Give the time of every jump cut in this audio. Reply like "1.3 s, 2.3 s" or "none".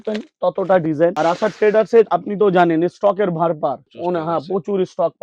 none